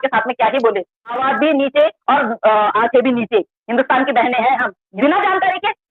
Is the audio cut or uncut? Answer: cut